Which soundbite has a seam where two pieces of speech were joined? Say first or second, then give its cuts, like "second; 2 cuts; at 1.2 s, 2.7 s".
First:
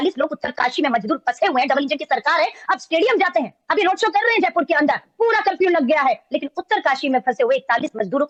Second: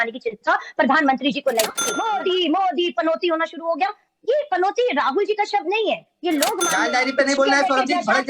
second; 2 cuts; at 1.8 s, 6.7 s